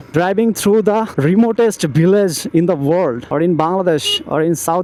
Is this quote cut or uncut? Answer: uncut